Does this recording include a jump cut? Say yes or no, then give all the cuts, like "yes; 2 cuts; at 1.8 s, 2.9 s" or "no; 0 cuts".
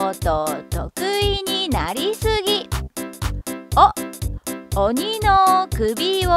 yes; 1 cut; at 4.7 s